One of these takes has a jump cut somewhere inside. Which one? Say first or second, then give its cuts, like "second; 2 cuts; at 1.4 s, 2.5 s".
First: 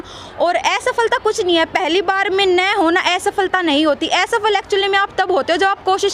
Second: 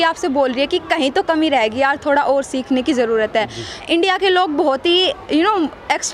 second; 1 cut; at 3.8 s